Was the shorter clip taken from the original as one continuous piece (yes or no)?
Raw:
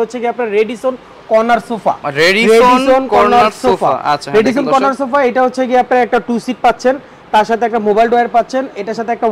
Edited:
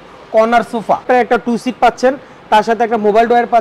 no